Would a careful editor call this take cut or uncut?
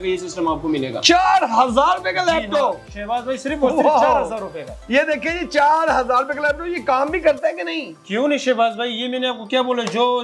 uncut